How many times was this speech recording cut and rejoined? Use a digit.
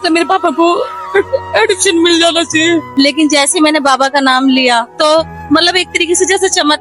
2